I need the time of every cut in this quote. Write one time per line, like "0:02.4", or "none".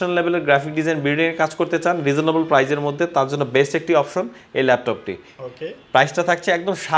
none